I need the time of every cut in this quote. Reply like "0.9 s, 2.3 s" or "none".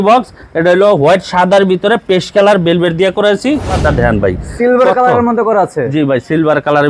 3.8 s